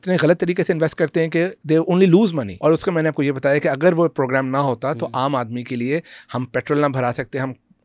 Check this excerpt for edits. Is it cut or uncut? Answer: cut